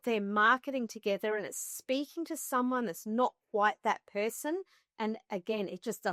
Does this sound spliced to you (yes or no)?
no